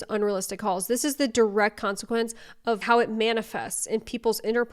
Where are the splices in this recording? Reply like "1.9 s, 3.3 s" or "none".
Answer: 2.8 s